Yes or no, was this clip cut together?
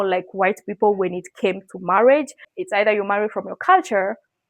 yes